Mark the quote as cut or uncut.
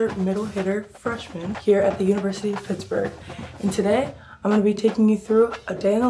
cut